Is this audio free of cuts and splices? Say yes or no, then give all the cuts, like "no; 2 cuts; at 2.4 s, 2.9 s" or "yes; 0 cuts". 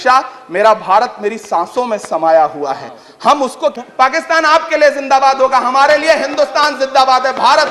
no; 1 cut; at 3.8 s